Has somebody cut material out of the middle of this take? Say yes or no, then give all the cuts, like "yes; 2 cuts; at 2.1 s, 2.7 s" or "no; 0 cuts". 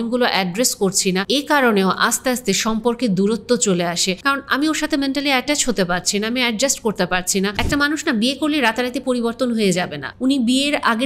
yes; 4 cuts; at 1.2 s, 4.1 s, 7.6 s, 10.0 s